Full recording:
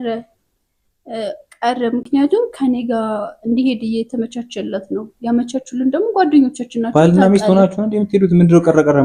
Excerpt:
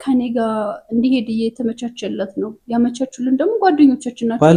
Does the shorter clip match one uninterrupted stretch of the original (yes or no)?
yes